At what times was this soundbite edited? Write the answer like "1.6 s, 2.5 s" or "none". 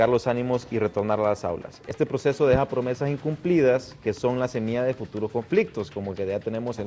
2.3 s